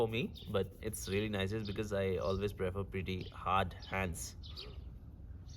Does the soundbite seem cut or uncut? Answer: uncut